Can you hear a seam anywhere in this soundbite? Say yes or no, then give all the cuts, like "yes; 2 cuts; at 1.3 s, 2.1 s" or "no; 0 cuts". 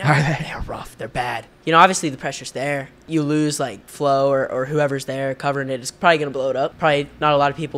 yes; 3 cuts; at 1.5 s, 2.9 s, 6.7 s